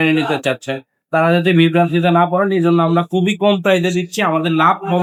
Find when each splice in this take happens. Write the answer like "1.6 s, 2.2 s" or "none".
none